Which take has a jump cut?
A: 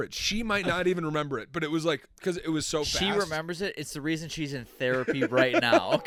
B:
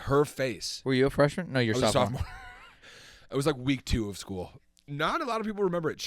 B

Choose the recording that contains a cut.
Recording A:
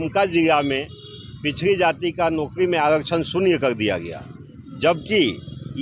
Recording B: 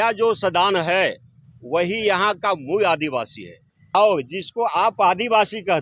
B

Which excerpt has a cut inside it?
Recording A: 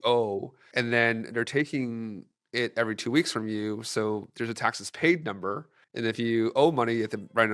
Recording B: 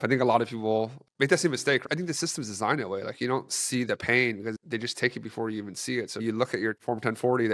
B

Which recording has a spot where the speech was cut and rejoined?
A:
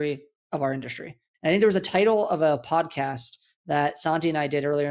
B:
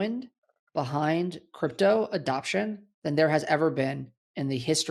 A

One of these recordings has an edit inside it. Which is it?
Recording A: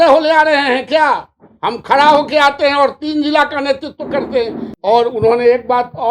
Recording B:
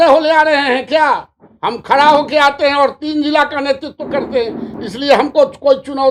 A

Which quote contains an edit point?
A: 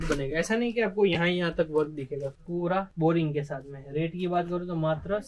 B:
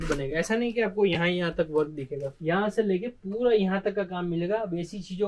A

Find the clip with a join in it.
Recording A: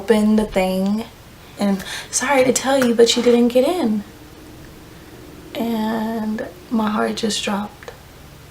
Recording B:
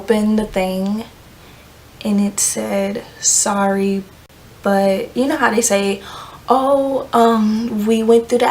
A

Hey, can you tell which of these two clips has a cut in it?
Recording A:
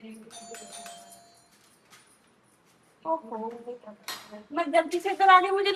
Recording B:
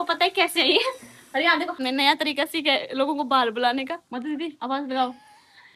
B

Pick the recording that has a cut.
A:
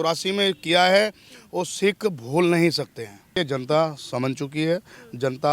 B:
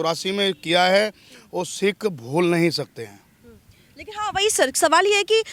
A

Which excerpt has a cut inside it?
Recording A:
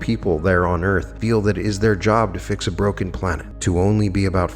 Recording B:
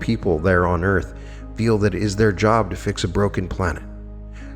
A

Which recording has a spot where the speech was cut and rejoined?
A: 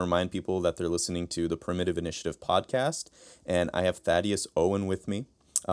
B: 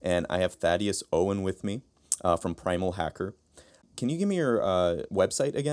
B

